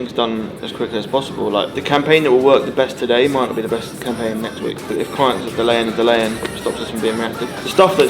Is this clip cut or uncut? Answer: cut